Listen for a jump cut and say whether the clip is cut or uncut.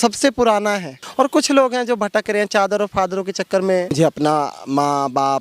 cut